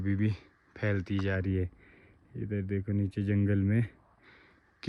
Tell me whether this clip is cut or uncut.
uncut